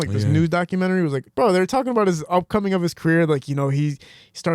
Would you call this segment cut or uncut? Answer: cut